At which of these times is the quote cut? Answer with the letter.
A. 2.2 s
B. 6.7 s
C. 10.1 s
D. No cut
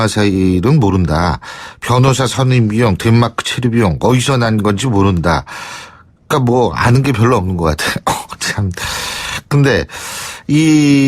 C